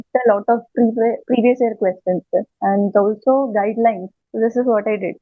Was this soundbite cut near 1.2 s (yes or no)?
no